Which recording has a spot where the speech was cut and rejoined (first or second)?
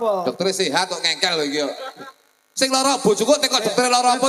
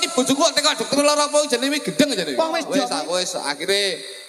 second